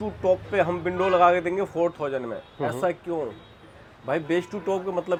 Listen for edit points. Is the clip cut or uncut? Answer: uncut